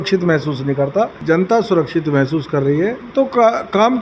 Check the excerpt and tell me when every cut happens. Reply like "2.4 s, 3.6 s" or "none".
1.2 s, 3.0 s

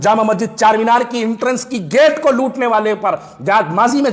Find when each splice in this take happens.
none

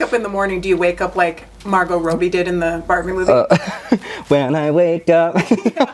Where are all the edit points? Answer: none

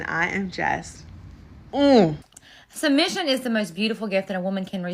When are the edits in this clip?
2.2 s

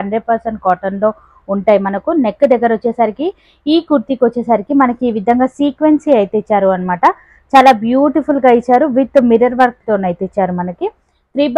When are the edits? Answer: none

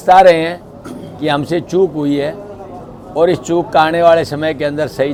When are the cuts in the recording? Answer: none

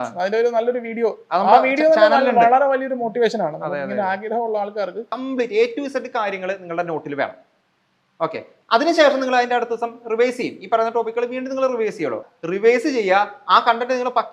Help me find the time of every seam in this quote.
5.1 s, 12.2 s

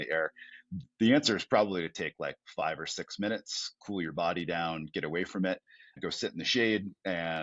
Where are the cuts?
5.9 s

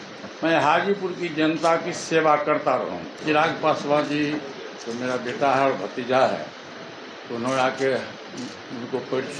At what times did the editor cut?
3.2 s

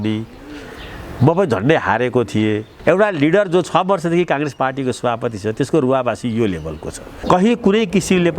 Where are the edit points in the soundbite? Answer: 2.7 s, 7.2 s

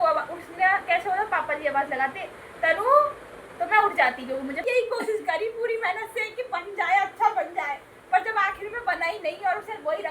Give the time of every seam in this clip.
4.6 s

